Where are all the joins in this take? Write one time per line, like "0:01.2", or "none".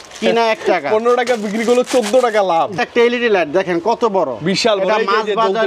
0:02.8

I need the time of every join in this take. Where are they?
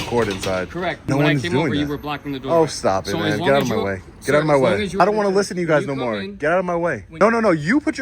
0:01.1
0:05.0
0:07.1

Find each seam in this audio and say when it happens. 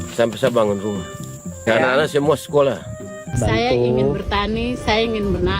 0:01.6
0:03.3

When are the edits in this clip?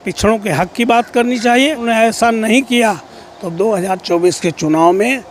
0:01.8

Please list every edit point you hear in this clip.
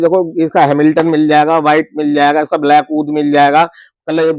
none

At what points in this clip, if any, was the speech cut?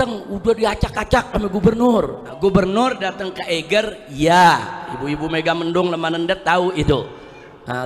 0:02.2

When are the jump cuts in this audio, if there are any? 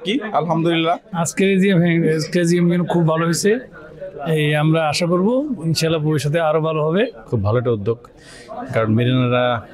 none

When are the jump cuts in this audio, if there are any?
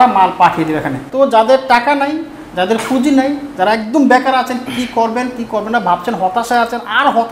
0:01.0

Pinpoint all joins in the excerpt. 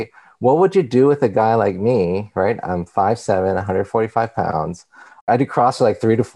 0:05.3

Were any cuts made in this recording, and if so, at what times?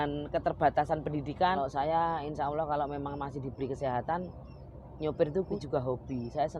0:01.6
0:05.6

